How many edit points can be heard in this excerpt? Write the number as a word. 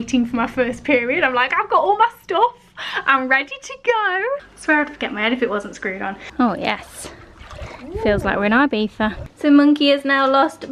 three